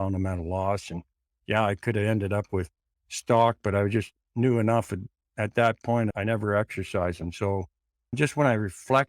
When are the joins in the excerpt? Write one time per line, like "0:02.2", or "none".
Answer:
0:06.1
0:08.2